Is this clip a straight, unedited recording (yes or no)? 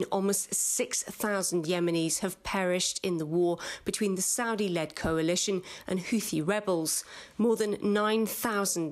no